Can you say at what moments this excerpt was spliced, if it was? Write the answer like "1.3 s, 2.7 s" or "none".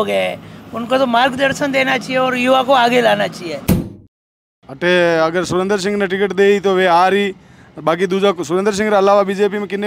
3.9 s